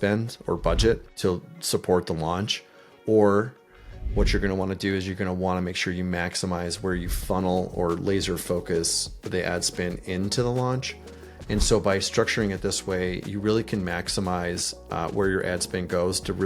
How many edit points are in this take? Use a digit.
1